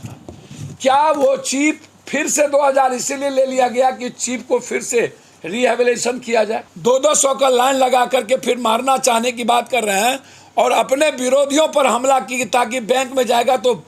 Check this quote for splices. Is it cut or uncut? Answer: cut